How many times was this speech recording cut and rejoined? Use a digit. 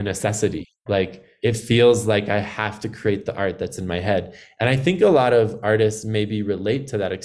1